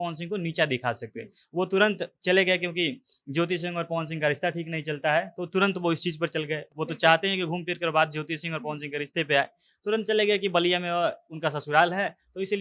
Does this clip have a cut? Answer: no; 0 cuts

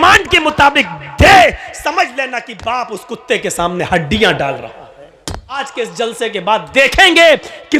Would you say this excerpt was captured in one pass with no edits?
no; 1 cut; at 5.6 s

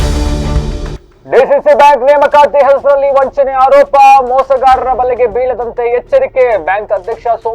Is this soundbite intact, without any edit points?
yes; 0 cuts

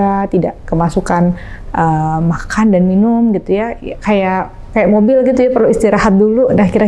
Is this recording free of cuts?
yes; 0 cuts

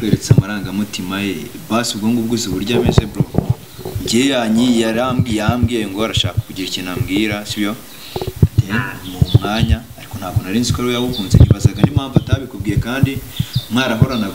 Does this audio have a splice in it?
no; 0 cuts

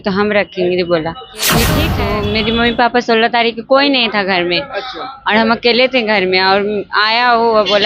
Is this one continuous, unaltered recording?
no; 1 cut; at 1.8 s

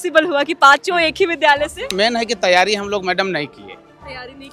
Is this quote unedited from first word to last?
no; 1 cut; at 1.9 s

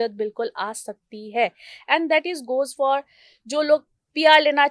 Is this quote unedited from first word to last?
yes; 0 cuts

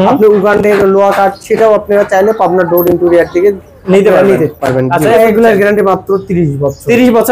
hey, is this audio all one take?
no; 1 cut; at 5.2 s

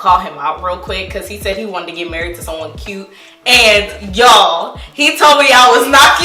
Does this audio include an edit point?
no; 0 cuts

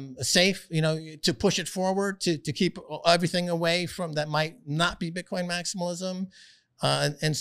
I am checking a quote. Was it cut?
no; 0 cuts

